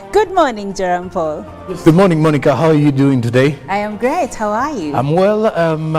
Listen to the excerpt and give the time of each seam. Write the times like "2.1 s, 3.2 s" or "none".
4.5 s